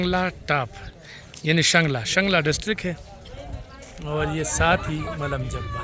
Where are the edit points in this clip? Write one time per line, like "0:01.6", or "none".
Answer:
none